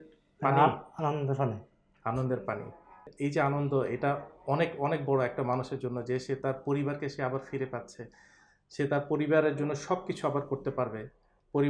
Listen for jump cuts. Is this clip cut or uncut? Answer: cut